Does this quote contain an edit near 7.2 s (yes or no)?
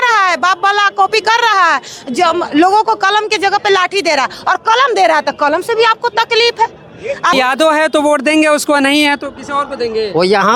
yes